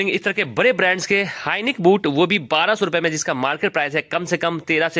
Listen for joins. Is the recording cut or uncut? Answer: uncut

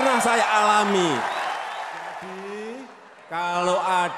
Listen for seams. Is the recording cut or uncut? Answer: cut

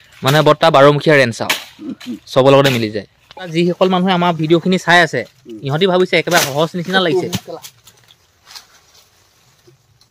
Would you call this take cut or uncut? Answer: cut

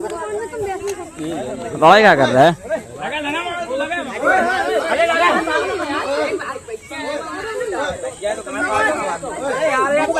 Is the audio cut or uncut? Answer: uncut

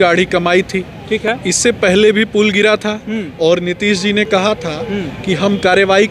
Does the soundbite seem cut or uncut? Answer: uncut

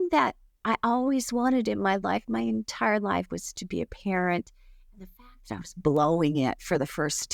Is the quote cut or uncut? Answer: uncut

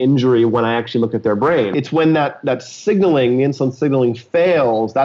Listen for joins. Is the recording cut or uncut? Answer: cut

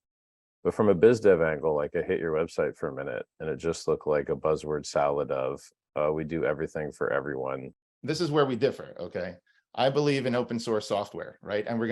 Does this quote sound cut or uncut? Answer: cut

